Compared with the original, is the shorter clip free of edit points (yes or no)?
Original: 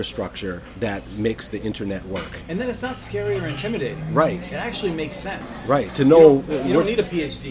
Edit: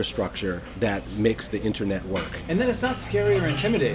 yes